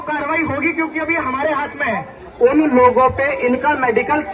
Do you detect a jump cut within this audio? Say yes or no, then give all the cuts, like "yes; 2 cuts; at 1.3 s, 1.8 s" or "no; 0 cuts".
yes; 1 cut; at 2.2 s